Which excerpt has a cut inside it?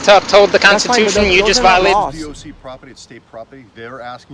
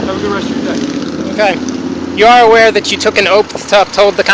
first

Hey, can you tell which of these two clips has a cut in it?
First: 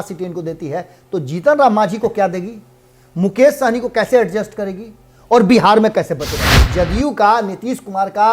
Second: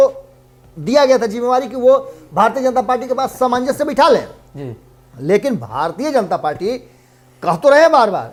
first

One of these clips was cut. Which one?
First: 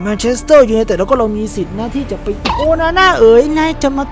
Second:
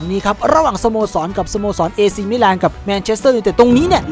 first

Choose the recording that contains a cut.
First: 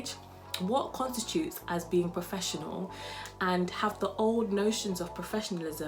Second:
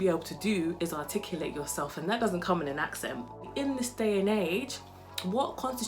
second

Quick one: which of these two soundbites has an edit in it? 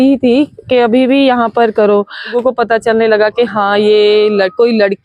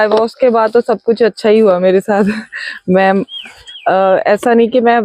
first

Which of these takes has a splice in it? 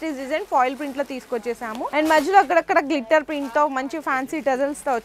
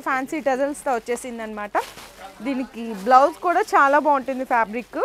first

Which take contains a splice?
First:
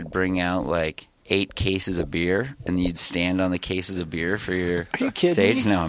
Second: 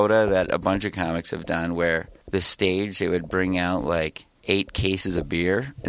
second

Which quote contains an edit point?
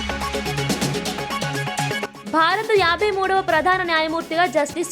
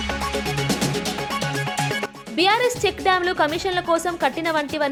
first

